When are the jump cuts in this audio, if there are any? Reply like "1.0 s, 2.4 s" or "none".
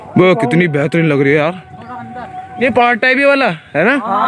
2.6 s